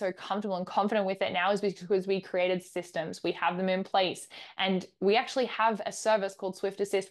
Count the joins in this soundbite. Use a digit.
0